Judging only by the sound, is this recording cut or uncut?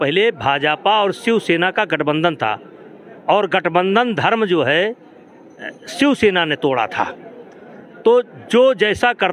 uncut